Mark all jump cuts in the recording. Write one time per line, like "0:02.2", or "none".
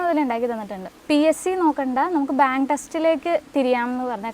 0:00.9